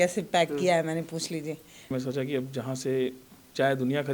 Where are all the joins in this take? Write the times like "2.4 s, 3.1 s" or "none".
1.9 s